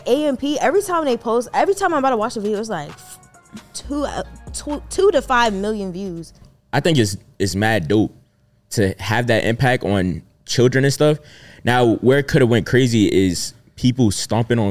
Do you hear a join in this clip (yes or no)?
yes